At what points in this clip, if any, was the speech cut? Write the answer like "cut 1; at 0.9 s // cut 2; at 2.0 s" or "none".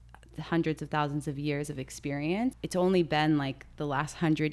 cut 1; at 2.6 s